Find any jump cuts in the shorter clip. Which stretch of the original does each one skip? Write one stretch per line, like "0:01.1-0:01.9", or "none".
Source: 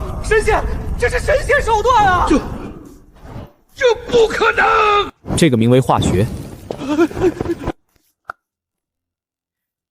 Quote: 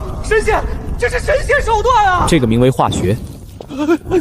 0:02.2-0:05.3

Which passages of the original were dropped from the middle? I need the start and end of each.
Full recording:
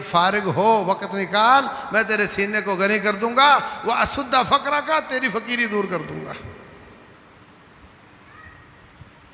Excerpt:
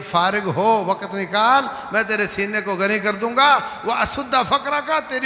none

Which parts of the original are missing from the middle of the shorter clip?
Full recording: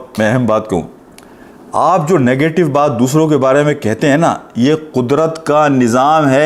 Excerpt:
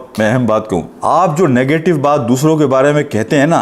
0:00.9-0:01.6

